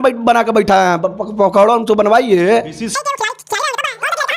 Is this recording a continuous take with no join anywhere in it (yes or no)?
yes